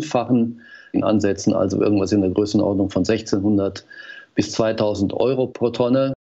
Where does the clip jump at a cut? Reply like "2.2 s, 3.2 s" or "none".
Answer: 1.0 s

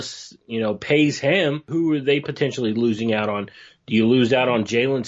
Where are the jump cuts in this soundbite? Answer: 1.6 s

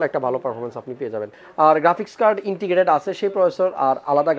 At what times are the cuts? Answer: 1.4 s

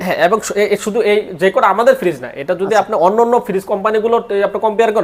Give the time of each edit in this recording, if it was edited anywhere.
none

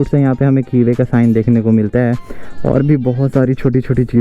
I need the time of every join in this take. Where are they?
none

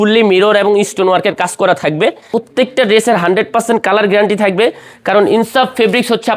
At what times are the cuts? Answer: 2.3 s

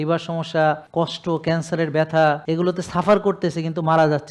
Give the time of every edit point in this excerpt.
0.8 s, 2.4 s

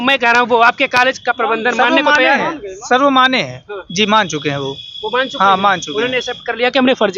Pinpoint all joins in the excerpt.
none

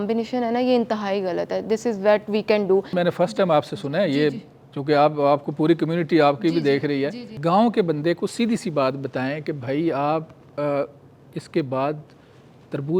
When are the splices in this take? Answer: 7.3 s

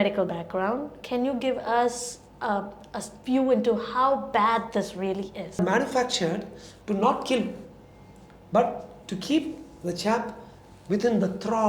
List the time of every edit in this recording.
5.6 s

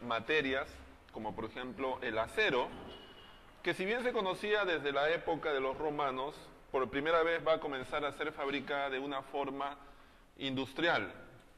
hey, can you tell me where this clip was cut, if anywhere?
7.1 s

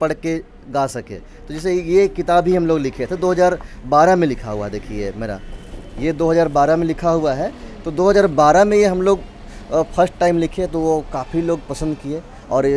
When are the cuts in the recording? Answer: none

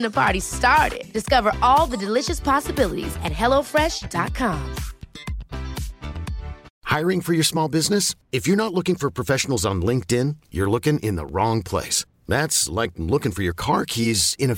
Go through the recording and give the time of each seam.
6.7 s

